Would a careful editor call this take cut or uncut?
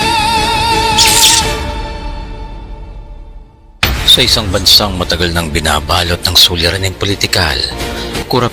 uncut